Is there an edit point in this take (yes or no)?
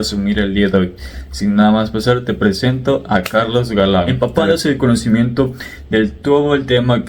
yes